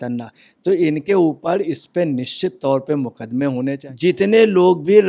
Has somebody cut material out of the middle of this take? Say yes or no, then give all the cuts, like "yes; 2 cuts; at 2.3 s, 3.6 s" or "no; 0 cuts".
yes; 1 cut; at 3.8 s